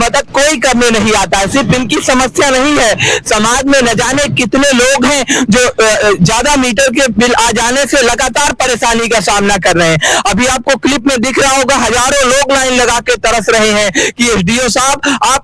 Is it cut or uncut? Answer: uncut